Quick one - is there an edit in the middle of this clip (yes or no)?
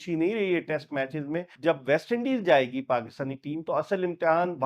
yes